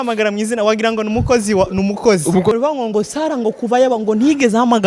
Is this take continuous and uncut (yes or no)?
no